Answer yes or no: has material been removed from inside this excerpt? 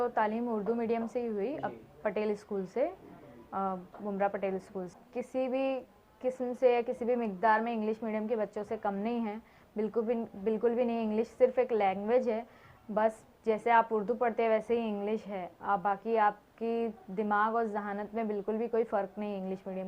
yes